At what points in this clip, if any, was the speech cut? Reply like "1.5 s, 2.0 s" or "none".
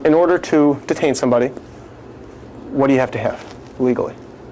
none